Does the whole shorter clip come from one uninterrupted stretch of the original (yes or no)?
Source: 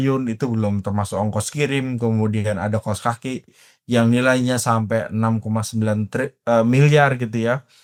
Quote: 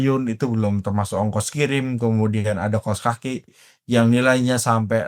yes